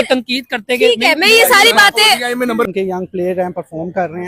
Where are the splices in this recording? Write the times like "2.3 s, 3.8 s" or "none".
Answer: 2.6 s